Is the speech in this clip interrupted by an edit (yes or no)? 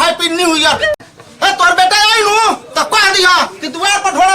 yes